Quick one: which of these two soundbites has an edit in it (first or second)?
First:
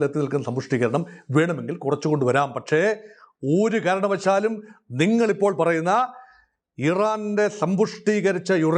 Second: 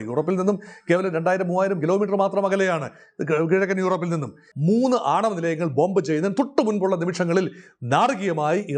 second